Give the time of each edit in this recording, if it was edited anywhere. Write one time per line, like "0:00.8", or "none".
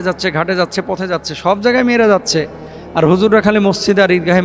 none